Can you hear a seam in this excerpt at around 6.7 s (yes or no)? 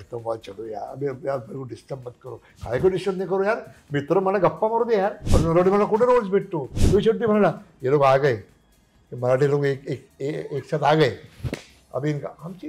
yes